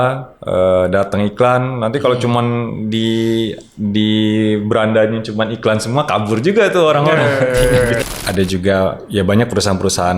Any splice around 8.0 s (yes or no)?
yes